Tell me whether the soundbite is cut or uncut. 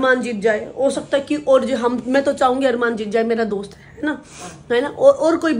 uncut